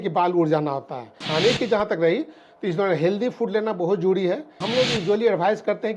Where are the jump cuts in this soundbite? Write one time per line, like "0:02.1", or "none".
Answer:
0:01.2
0:04.6